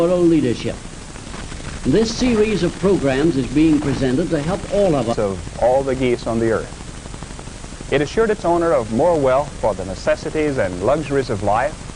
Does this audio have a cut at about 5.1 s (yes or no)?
no